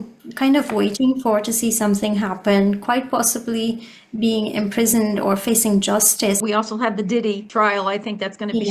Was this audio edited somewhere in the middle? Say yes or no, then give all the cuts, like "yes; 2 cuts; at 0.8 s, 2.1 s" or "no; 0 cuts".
yes; 2 cuts; at 6.4 s, 7.4 s